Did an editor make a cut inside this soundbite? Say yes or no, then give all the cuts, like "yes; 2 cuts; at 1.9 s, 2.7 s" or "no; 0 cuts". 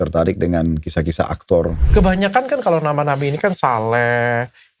yes; 1 cut; at 1.8 s